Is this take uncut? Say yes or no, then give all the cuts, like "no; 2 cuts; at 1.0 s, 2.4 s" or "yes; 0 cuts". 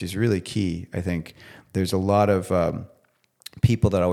yes; 0 cuts